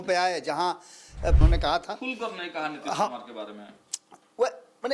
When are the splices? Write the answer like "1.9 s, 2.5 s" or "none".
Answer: 1.4 s